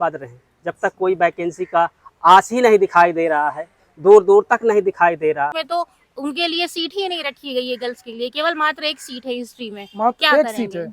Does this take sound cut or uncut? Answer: cut